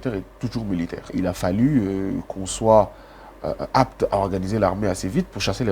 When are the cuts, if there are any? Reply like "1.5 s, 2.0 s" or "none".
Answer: 1.1 s